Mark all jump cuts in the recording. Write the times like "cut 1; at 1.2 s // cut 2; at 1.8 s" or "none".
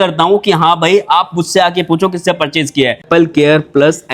cut 1; at 3.0 s